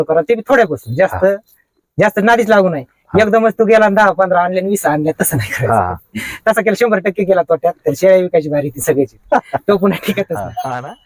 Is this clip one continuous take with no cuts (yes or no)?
yes